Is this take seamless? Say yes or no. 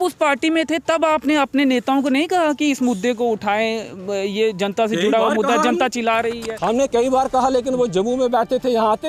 yes